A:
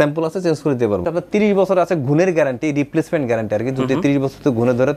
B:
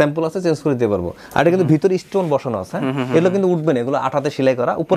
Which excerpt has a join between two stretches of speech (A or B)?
A